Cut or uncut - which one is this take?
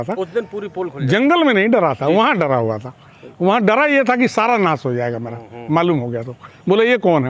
uncut